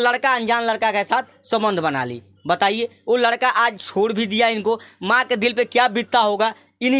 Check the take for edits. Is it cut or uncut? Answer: uncut